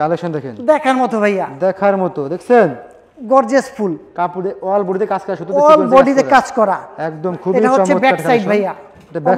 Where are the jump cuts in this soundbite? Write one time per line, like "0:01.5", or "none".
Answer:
none